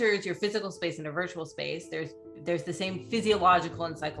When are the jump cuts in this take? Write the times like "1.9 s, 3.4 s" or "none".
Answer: none